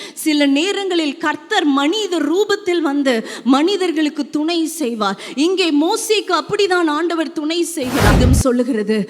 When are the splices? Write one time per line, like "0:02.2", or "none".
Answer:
0:08.1